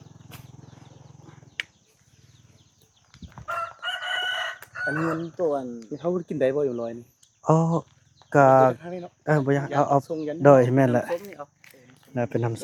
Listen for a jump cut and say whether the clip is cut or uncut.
uncut